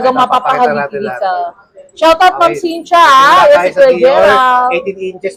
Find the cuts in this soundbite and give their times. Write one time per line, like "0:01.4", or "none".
none

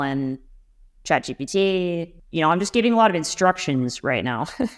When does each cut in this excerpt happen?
0:02.2

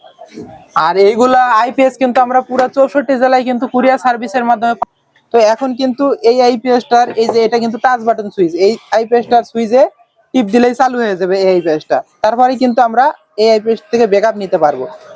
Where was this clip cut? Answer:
0:04.8

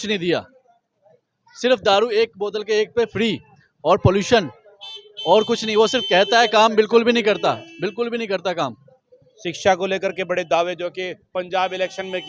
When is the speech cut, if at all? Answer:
none

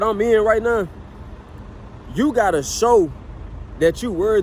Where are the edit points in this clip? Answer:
none

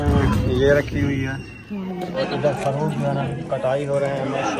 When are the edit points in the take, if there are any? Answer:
0:02.2

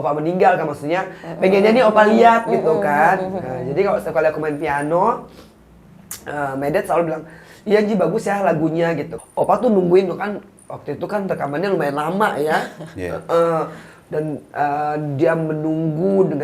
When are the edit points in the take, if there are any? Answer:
0:09.2

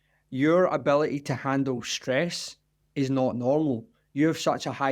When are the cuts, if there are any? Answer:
none

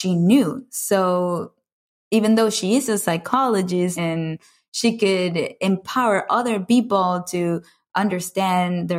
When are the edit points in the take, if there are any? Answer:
0:03.9

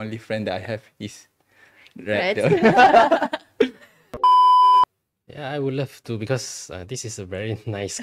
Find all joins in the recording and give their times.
0:04.2

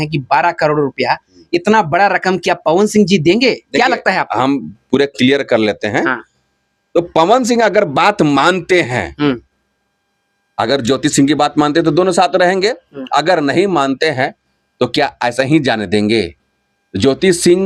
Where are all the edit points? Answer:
none

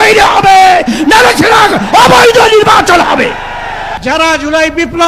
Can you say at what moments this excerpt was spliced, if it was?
0:03.9

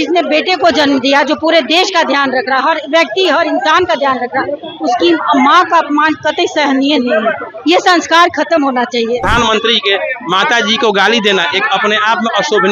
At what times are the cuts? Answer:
0:09.3

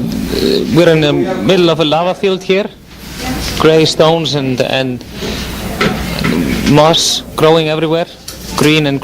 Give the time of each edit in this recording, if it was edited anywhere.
0:01.2

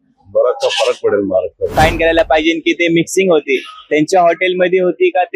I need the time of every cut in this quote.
0:01.6

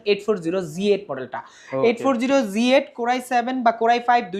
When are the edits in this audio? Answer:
none

